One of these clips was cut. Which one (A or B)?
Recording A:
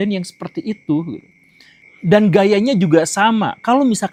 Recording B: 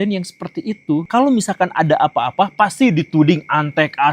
B